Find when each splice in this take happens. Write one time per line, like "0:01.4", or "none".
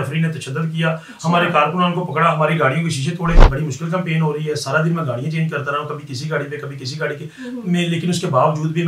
0:03.5